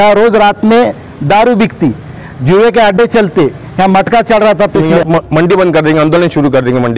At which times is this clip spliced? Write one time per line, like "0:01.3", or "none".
0:04.9